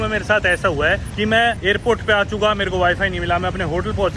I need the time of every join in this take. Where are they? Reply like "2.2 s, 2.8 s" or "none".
1.3 s